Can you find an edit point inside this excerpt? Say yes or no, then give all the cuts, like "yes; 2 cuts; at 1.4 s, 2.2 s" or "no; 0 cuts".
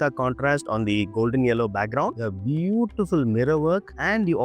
yes; 1 cut; at 2.1 s